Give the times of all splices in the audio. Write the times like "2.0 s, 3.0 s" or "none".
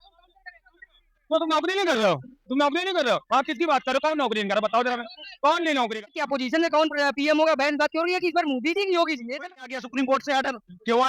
6.0 s, 9.5 s